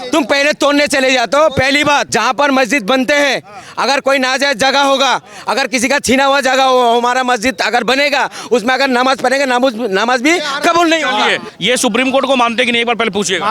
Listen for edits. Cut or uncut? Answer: cut